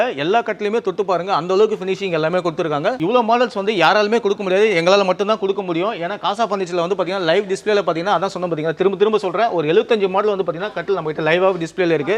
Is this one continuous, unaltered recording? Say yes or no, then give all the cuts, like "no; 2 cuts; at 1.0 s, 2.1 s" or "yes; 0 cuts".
yes; 0 cuts